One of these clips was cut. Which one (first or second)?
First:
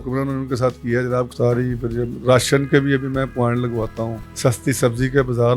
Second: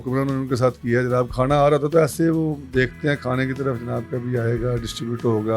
first